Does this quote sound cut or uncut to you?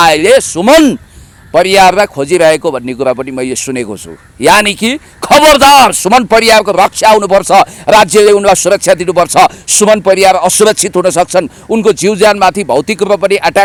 uncut